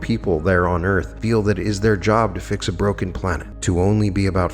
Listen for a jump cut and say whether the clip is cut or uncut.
cut